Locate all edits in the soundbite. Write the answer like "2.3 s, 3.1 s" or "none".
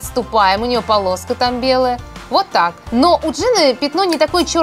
none